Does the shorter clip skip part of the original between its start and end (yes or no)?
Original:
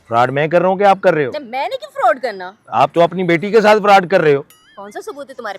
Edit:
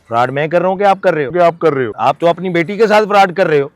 yes